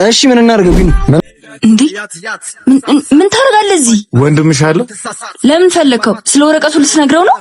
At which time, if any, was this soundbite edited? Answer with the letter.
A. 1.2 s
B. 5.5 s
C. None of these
A